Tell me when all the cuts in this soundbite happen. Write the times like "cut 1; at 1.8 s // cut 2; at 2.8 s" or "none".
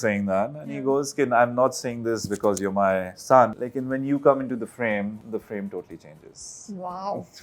cut 1; at 3.6 s // cut 2; at 5.2 s